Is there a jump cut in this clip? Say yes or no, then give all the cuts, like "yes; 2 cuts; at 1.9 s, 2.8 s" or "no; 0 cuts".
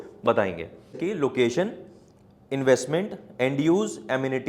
yes; 1 cut; at 1.0 s